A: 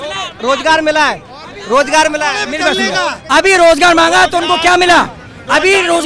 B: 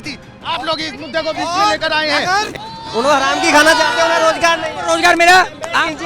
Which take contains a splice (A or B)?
B